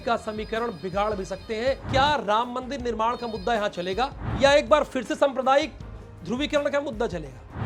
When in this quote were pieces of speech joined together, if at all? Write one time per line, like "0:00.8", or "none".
0:01.8
0:04.2